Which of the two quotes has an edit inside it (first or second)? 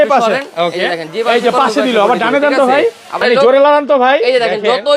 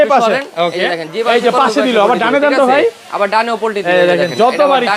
first